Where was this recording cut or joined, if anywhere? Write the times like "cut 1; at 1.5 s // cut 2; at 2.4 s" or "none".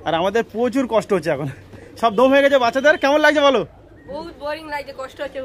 none